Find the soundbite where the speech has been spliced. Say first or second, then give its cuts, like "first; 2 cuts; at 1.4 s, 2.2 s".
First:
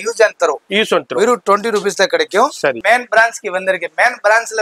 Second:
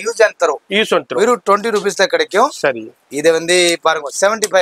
first; 1 cut; at 2.8 s